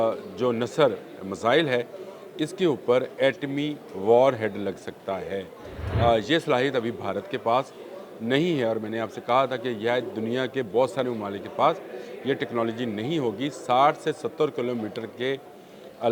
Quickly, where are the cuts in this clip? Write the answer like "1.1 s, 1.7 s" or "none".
none